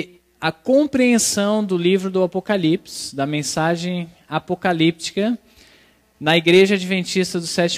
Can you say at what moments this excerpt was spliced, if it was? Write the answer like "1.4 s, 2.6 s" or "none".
4.5 s